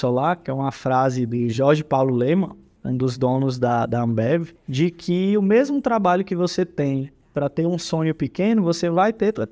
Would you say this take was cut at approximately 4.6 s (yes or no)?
yes